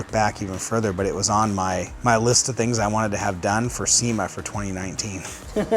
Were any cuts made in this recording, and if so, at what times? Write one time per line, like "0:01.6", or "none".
0:01.9